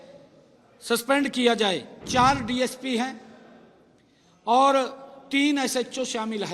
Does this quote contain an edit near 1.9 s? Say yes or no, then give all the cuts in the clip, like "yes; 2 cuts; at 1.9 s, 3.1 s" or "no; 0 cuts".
yes; 1 cut; at 1.9 s